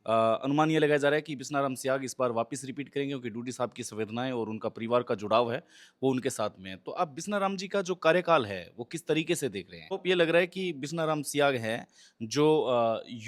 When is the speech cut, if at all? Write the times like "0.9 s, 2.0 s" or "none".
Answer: 9.9 s